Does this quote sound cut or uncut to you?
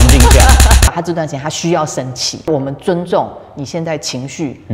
cut